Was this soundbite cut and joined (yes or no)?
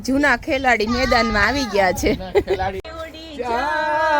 yes